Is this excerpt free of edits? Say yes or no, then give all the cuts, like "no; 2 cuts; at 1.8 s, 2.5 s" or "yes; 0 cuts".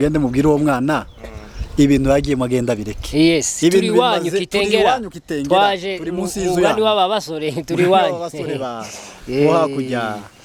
yes; 0 cuts